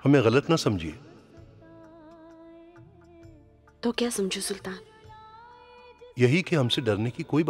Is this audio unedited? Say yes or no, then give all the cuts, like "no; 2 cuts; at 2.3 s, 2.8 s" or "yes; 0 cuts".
yes; 0 cuts